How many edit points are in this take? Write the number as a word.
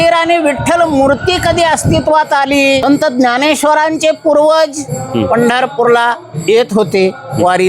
one